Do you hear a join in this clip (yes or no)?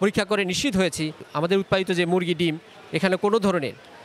yes